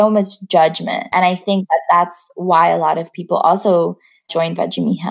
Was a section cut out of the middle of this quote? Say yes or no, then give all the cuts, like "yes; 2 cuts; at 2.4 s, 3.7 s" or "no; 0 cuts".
yes; 1 cut; at 1.0 s